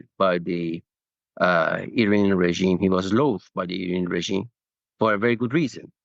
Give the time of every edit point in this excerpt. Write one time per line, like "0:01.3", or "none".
none